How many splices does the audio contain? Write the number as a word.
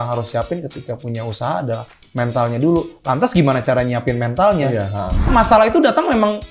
one